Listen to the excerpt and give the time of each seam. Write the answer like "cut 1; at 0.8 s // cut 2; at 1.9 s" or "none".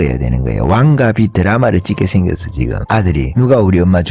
cut 1; at 3.1 s